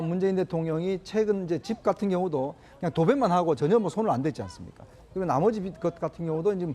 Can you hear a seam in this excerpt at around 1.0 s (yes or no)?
yes